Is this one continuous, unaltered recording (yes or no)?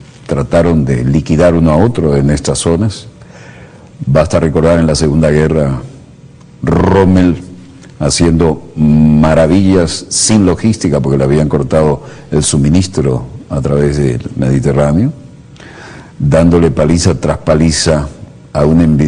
no